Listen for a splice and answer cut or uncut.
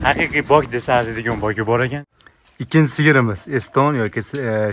cut